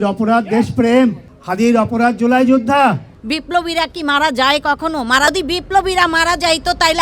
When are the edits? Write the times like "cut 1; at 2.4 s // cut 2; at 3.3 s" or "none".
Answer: cut 1; at 3.1 s